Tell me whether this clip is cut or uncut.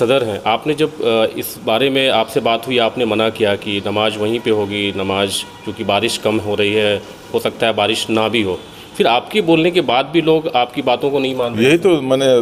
uncut